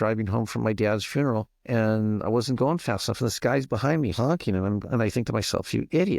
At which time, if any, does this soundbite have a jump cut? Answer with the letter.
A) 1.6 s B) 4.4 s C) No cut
A